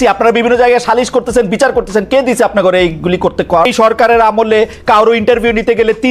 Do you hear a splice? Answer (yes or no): yes